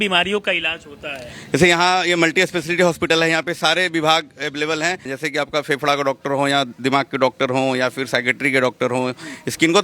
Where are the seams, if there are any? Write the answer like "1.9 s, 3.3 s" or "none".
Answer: none